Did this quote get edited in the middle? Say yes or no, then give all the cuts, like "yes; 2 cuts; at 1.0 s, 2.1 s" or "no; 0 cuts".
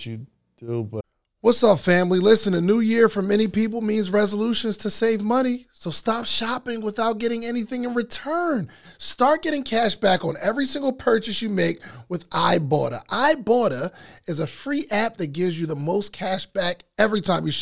no; 0 cuts